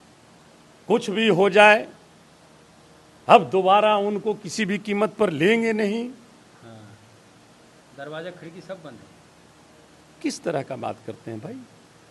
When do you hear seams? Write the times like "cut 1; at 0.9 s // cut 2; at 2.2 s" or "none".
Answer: none